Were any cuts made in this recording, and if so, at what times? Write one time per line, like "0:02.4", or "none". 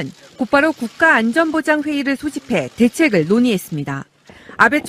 none